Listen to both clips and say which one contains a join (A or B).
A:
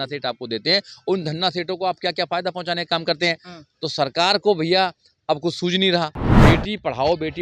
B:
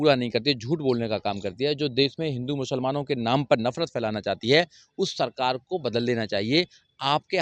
A